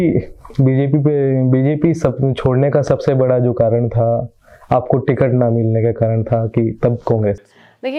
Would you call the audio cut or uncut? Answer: uncut